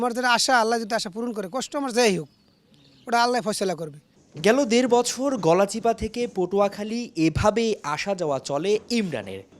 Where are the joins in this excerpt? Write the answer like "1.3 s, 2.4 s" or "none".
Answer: none